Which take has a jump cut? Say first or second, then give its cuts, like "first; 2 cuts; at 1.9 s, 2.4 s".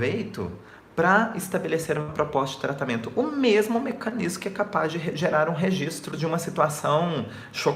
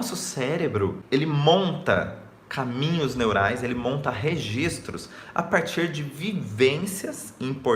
second; 1 cut; at 1.0 s